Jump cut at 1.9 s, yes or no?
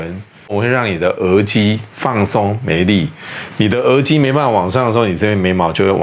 no